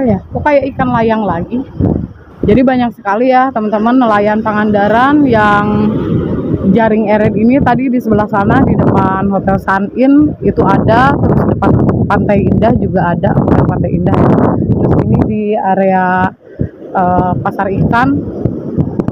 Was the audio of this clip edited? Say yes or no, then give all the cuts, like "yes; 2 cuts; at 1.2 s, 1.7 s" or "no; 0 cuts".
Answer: yes; 1 cut; at 2.3 s